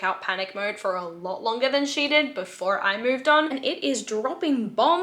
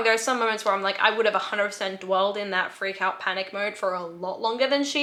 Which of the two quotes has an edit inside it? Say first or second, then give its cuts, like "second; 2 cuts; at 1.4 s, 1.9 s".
first; 1 cut; at 3.5 s